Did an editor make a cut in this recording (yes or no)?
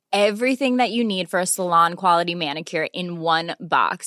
no